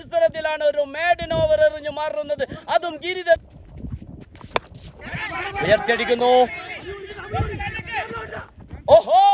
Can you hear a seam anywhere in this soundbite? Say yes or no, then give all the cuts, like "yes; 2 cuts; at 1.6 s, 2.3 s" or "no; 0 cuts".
yes; 1 cut; at 3.4 s